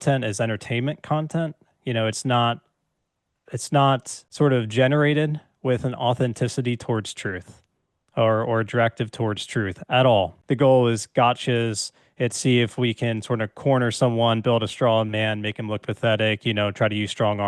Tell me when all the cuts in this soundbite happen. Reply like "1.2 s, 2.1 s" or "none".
4.2 s, 10.4 s

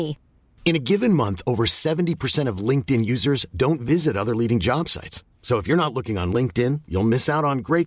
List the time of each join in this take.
none

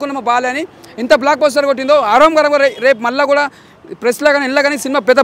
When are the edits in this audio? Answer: none

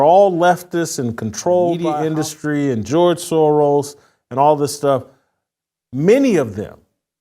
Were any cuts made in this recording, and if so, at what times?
1.9 s

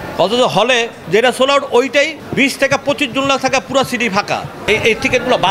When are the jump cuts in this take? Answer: 1.0 s, 2.2 s, 4.6 s

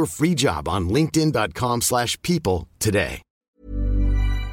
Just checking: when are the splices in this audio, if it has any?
3.5 s

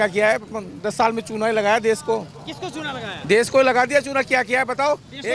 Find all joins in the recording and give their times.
none

